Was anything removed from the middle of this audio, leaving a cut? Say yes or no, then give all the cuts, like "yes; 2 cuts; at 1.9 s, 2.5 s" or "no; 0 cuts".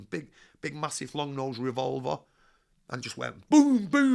no; 0 cuts